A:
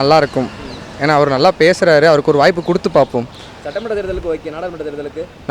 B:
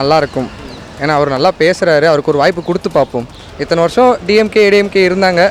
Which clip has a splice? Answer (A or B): B